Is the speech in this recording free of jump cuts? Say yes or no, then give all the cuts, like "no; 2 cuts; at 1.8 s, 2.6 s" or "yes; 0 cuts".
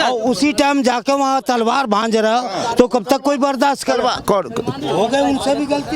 yes; 0 cuts